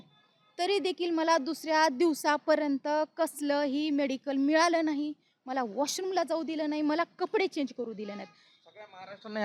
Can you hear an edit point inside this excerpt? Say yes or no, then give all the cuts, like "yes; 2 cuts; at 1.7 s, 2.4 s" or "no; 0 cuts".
no; 0 cuts